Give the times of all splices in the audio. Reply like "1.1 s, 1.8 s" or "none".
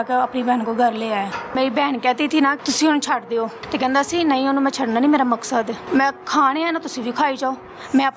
1.5 s, 2.6 s, 3.6 s, 5.8 s